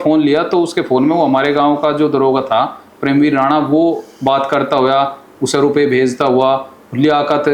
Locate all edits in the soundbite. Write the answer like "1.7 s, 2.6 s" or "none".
none